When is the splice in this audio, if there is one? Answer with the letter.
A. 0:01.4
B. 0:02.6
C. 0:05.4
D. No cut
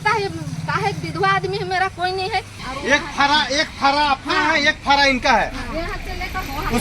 B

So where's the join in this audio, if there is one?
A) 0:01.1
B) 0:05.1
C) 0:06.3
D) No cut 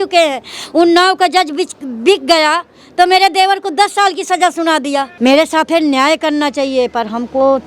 B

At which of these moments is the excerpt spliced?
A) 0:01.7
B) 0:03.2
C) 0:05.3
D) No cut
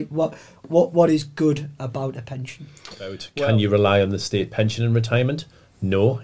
B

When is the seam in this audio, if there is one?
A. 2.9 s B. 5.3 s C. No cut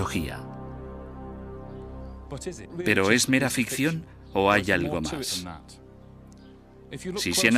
B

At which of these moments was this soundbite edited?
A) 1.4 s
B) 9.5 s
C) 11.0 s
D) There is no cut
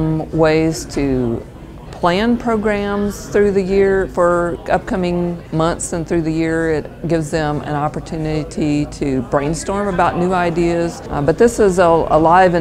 C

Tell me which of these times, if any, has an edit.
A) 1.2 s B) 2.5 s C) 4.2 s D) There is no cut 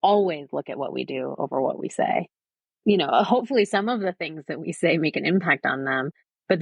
B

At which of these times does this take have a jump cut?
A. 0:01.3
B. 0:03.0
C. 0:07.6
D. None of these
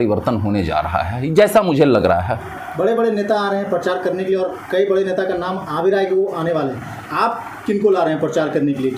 D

